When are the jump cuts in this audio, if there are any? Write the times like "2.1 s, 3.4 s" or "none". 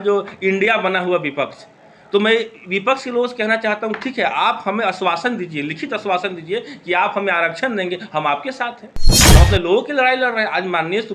9.1 s